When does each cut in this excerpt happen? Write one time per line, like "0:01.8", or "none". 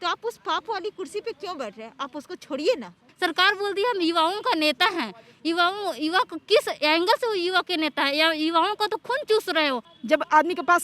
0:03.0
0:09.9